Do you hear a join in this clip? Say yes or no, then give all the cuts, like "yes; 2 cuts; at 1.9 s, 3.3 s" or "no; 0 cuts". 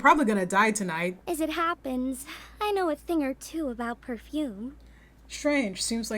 yes; 1 cut; at 1.1 s